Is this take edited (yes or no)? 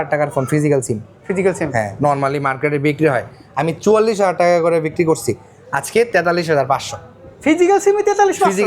no